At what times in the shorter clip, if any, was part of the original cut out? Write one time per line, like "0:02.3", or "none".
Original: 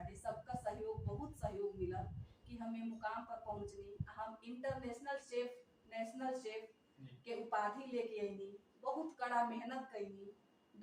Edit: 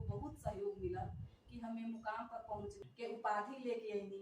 0:02.8

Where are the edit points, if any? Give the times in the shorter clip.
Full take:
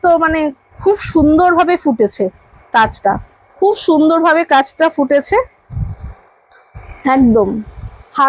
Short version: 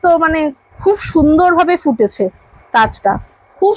none

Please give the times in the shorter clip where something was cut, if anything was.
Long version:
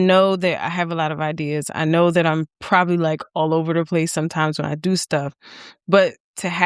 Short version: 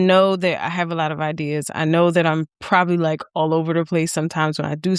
none

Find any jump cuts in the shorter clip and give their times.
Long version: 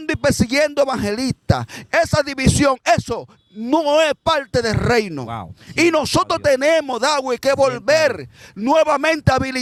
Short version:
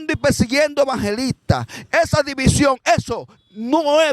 none

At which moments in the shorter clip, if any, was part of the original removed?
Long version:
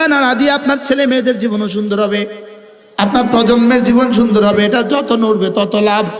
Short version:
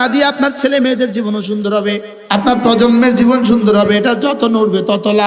0:02.1

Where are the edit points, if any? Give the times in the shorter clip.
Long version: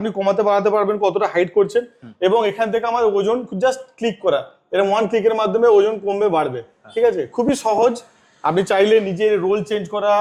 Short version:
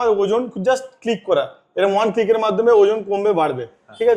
none

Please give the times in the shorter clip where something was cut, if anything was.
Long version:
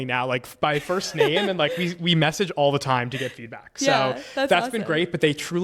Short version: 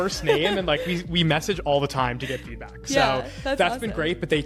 none

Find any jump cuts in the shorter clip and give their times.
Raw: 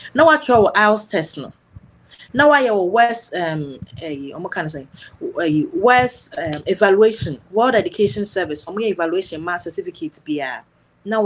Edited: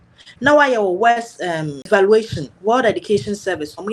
0:01.9

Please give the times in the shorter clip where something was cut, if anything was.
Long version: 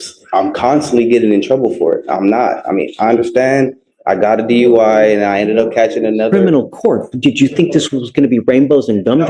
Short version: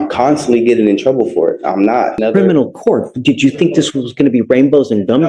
0:02.2

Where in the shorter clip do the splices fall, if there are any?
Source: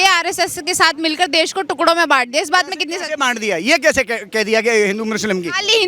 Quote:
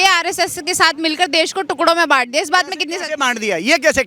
none

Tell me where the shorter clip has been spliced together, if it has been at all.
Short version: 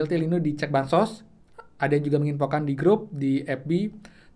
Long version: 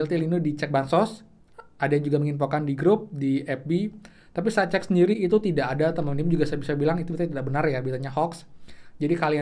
none

